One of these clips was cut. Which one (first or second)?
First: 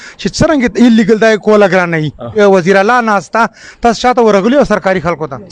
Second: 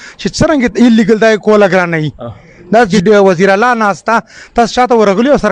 first